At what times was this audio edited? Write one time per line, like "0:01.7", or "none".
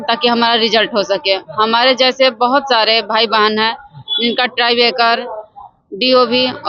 none